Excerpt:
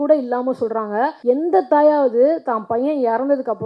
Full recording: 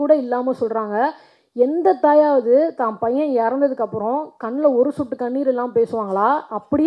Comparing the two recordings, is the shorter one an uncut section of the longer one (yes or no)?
no